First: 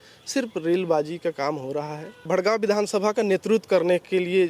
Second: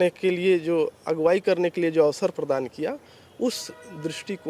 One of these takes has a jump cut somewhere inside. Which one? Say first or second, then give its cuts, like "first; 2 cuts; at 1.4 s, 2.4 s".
first; 1 cut; at 2.1 s